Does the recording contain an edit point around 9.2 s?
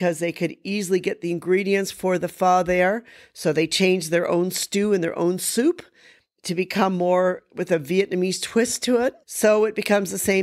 yes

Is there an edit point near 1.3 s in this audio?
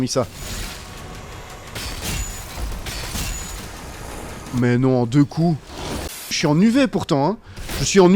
no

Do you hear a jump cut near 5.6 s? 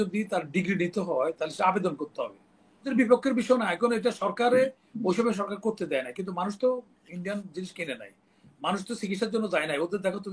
no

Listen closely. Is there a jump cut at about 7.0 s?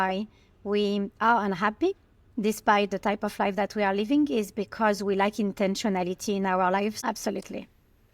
yes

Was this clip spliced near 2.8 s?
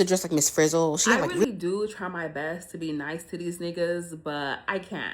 no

